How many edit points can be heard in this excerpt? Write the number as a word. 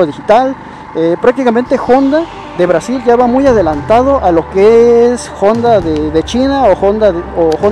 zero